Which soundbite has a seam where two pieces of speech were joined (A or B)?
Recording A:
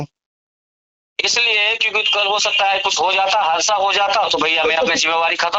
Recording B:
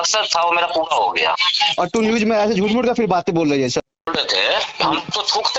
B